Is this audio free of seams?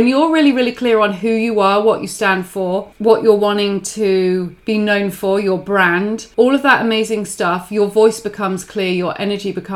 no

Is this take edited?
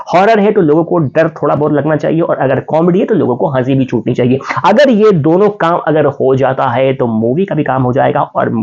no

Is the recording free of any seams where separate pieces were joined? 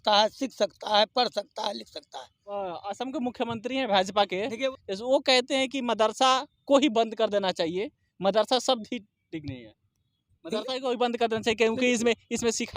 no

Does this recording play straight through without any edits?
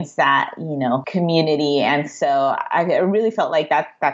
no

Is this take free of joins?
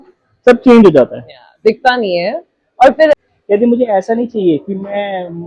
no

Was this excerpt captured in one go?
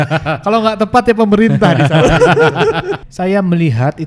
no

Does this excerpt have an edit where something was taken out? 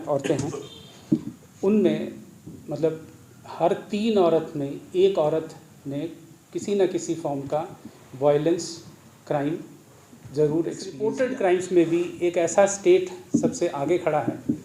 yes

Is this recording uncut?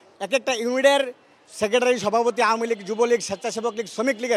yes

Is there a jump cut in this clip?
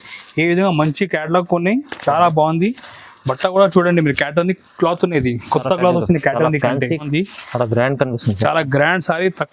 yes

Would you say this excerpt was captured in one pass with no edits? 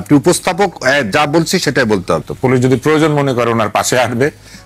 no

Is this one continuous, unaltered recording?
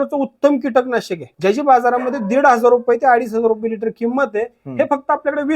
no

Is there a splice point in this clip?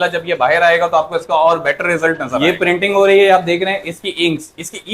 yes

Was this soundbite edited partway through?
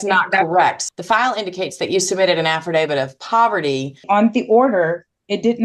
yes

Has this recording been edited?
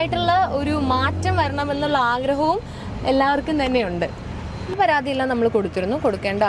yes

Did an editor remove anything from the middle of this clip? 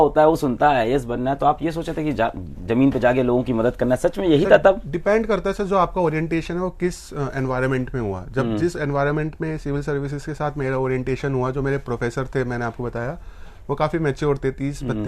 no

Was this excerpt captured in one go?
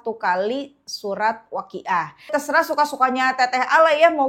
no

